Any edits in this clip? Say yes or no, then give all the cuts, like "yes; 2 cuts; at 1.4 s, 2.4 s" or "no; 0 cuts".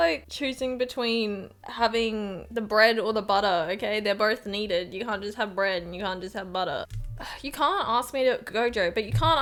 no; 0 cuts